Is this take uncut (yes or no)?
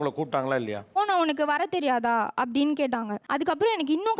no